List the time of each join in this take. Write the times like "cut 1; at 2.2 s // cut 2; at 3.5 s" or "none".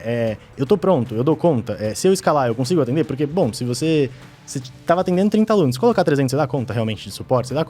none